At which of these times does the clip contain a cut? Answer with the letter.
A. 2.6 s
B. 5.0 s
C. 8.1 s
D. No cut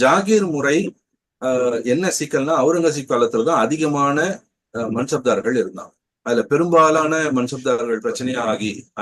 C